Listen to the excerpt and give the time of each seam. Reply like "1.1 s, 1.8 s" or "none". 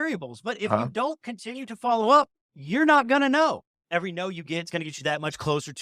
3.7 s